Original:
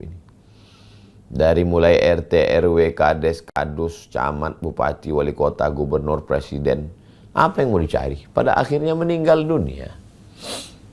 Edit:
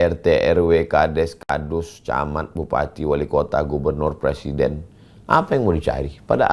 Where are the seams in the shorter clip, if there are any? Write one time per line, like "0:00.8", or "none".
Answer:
none